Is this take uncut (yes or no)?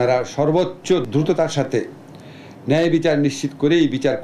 no